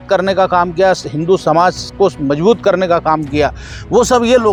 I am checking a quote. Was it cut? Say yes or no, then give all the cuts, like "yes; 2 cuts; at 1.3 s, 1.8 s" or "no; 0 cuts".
no; 0 cuts